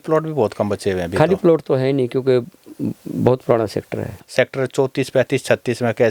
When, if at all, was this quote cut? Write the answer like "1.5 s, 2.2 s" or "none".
4.2 s